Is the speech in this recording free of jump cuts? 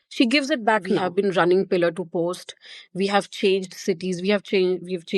no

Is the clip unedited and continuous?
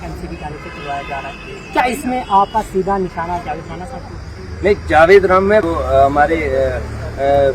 no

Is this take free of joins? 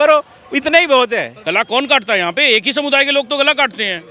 no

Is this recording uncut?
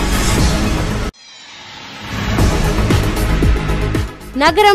no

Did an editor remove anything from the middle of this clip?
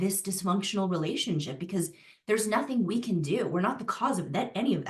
no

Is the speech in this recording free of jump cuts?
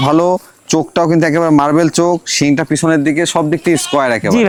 yes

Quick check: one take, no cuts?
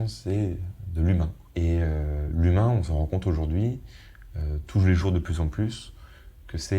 no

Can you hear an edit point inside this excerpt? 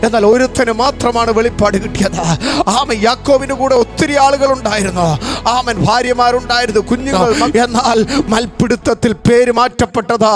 yes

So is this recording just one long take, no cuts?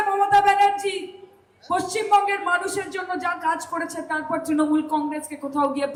yes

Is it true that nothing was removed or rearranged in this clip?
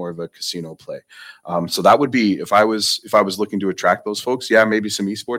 yes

